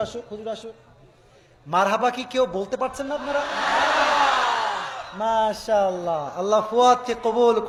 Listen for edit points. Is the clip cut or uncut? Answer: uncut